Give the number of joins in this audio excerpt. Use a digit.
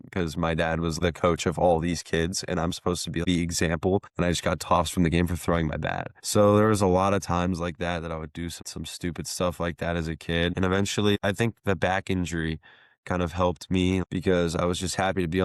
0